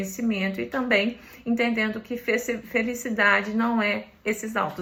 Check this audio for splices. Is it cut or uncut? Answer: uncut